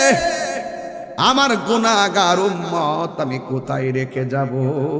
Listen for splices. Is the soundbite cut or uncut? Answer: uncut